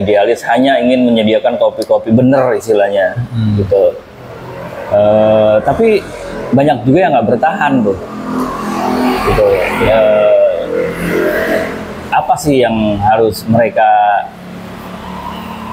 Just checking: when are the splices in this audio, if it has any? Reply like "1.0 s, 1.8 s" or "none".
none